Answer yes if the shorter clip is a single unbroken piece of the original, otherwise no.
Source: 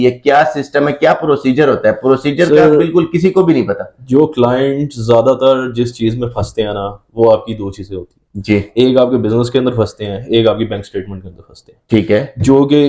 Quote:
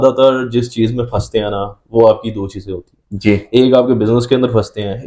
yes